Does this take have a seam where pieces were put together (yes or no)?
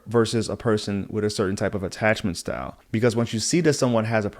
yes